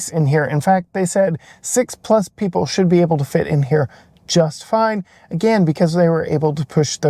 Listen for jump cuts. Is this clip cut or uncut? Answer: uncut